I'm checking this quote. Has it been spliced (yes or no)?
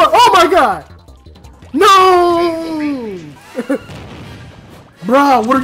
yes